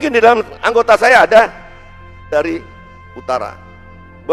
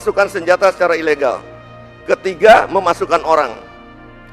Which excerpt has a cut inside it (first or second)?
first